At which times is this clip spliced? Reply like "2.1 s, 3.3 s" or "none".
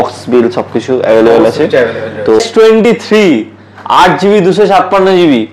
2.4 s